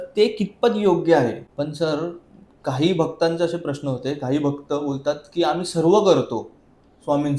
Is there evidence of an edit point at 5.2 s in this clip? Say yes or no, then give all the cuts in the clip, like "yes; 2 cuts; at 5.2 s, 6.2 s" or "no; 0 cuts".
no; 1 cut; at 1.4 s